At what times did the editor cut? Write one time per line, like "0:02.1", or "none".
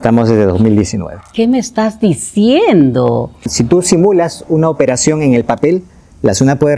0:03.5